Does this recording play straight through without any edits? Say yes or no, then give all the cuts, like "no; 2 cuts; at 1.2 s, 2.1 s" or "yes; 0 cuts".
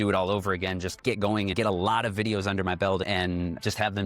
no; 1 cut; at 1.5 s